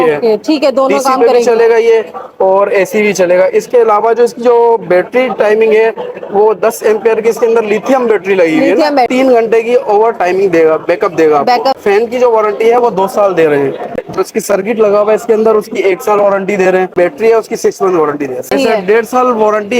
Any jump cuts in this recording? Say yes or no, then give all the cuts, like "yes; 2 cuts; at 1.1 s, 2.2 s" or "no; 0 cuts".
yes; 5 cuts; at 9.1 s, 11.8 s, 13.9 s, 16.9 s, 18.5 s